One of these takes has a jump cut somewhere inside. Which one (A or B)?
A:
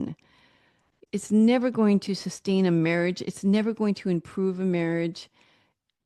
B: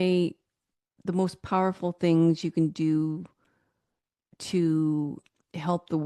A